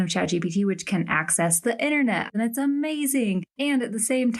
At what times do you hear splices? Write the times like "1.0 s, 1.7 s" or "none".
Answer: 2.3 s, 3.5 s